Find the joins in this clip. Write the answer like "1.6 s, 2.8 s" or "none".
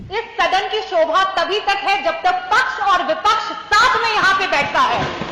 none